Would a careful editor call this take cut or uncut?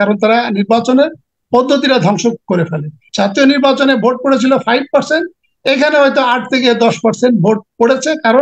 cut